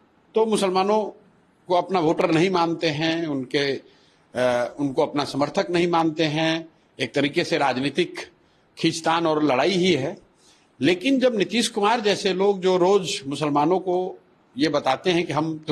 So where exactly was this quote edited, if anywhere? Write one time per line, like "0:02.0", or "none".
none